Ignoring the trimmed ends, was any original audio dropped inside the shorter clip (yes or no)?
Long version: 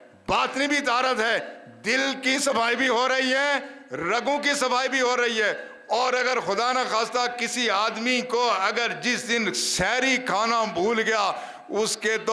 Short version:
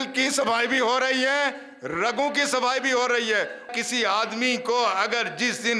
yes